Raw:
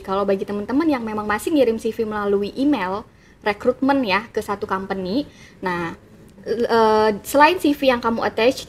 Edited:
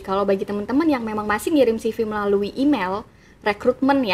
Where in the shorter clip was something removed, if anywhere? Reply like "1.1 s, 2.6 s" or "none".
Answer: none